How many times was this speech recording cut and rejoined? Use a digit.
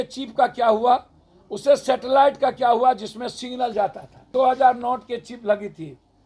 1